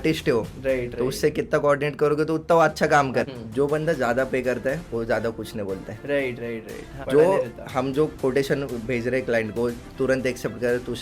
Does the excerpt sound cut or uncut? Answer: cut